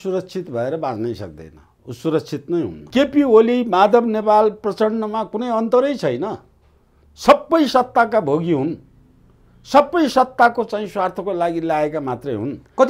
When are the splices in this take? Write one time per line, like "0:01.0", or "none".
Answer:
0:02.8